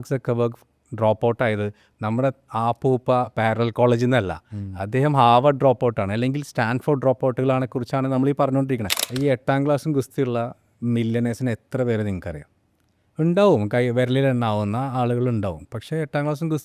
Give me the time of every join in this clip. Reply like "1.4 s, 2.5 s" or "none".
9.0 s

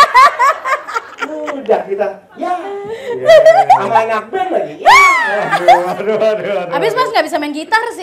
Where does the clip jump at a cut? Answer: none

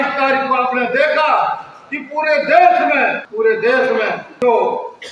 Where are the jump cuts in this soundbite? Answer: 3.2 s, 4.2 s

